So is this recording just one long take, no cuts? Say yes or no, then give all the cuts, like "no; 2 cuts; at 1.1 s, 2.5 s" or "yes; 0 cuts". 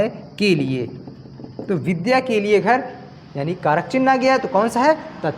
yes; 0 cuts